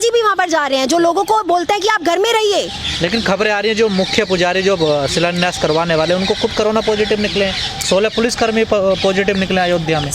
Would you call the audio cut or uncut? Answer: uncut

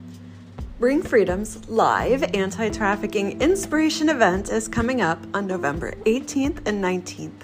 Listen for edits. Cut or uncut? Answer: uncut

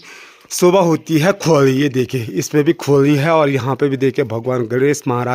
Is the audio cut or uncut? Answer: uncut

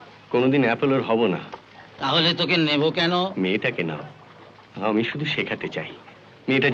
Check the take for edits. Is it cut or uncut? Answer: uncut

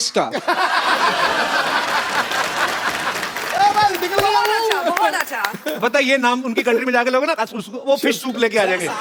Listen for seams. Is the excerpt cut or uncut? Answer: uncut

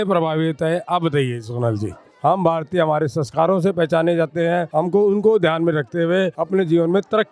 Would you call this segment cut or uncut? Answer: cut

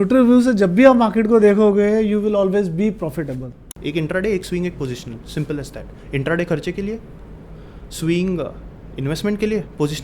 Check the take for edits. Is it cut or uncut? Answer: cut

